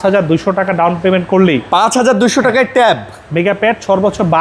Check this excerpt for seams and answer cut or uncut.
uncut